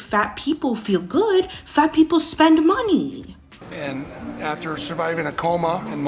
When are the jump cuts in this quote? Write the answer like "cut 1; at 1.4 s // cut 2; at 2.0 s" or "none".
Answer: cut 1; at 3.6 s